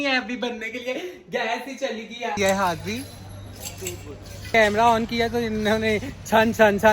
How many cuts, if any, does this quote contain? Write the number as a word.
two